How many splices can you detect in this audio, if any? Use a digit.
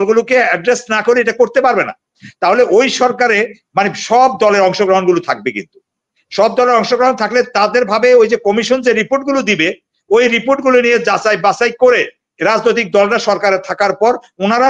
0